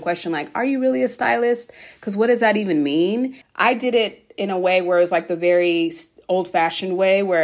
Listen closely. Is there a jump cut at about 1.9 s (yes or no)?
no